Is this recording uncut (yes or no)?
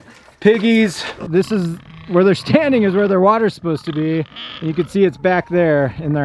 no